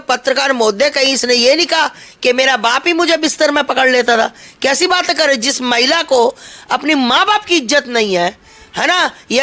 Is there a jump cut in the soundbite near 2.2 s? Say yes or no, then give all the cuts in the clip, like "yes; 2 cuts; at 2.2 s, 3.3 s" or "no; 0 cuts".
no; 0 cuts